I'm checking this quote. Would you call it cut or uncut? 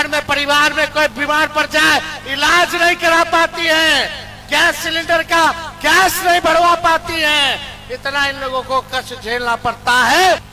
uncut